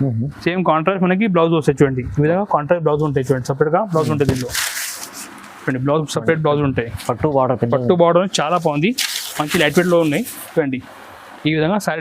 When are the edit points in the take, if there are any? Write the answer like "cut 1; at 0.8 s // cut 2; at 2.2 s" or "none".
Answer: none